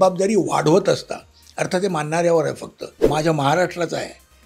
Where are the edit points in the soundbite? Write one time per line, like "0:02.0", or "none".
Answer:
0:03.0